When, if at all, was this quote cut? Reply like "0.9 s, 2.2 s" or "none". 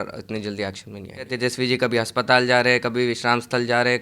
1.3 s